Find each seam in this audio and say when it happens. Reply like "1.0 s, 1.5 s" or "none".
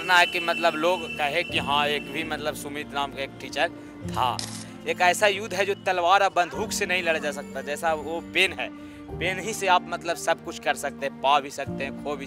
4.7 s